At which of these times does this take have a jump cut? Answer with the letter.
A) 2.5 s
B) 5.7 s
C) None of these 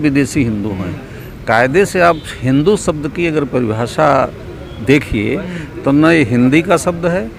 C